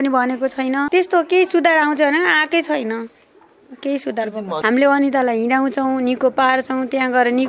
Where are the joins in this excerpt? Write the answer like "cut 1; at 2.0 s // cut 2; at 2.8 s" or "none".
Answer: cut 1; at 0.9 s // cut 2; at 4.6 s